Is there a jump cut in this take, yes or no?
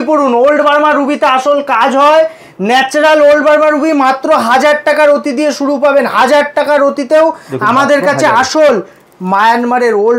no